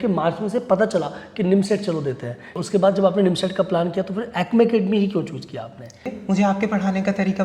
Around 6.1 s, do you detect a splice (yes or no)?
yes